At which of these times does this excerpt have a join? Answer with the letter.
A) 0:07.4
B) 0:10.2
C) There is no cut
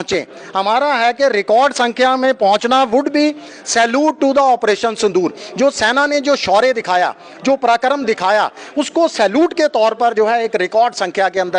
C